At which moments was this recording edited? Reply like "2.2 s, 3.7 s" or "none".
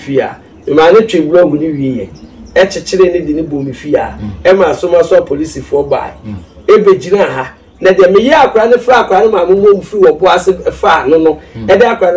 none